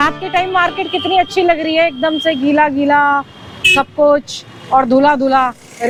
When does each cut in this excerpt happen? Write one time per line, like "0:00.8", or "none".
none